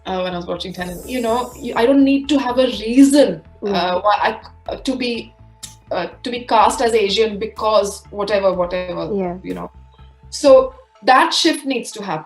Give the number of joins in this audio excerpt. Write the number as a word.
one